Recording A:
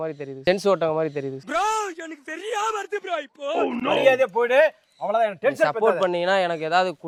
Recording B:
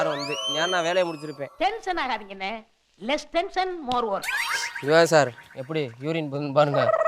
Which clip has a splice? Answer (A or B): B